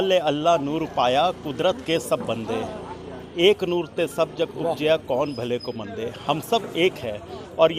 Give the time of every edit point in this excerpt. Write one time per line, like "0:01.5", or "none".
none